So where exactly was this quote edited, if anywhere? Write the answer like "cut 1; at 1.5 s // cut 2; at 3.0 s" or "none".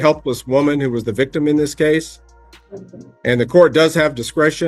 none